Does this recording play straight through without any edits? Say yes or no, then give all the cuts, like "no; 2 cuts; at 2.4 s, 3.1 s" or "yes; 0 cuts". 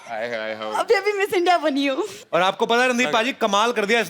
yes; 0 cuts